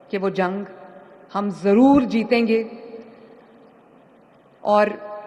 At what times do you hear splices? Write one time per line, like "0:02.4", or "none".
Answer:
none